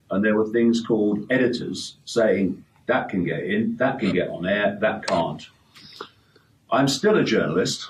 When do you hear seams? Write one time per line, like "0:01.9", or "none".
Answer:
none